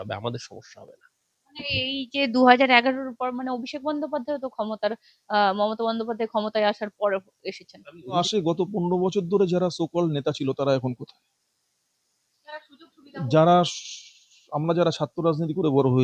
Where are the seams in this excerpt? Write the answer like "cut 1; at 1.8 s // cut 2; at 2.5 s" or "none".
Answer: cut 1; at 8.2 s